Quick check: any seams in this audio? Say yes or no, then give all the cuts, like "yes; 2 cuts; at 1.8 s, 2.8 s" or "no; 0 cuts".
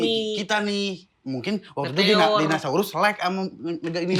no; 0 cuts